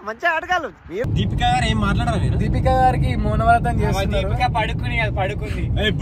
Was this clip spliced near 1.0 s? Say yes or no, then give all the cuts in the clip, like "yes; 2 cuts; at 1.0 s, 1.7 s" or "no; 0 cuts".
yes; 1 cut; at 1.0 s